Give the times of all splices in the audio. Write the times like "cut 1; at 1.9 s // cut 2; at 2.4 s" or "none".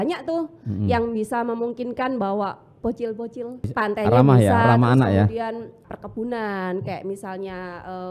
cut 1; at 3.7 s // cut 2; at 5.8 s

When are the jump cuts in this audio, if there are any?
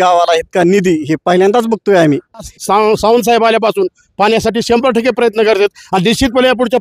cut 1; at 2.5 s

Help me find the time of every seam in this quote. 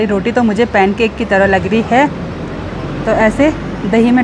none

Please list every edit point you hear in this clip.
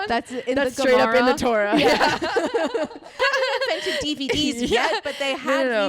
cut 1; at 3.2 s

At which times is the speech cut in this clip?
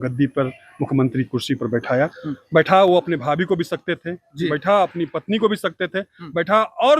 none

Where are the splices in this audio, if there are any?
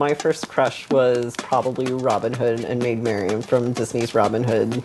none

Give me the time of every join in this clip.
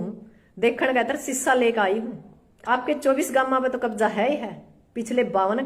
cut 1; at 2.6 s

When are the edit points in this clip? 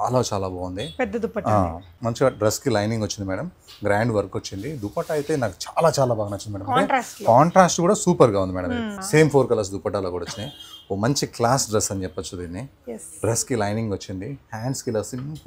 cut 1; at 1.9 s // cut 2; at 9.0 s

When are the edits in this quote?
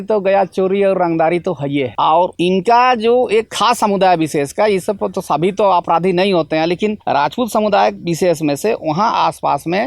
none

